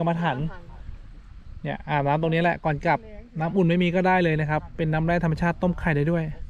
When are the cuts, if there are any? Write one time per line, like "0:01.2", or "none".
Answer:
none